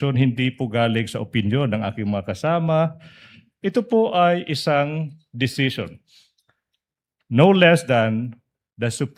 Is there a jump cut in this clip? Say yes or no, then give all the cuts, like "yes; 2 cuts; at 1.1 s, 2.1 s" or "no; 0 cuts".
no; 0 cuts